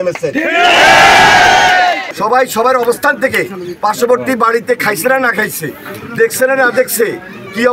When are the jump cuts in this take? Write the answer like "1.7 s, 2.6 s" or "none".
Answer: 2.0 s